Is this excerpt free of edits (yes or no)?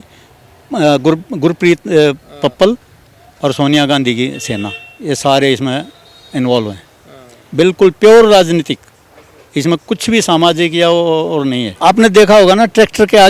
no